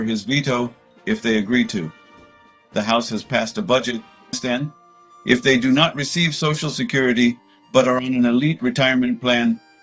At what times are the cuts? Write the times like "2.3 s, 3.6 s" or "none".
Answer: 4.4 s